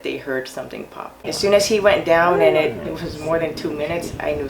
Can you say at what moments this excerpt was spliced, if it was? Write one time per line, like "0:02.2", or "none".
0:01.1
0:02.9